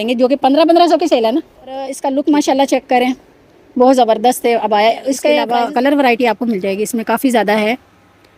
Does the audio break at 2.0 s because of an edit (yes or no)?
yes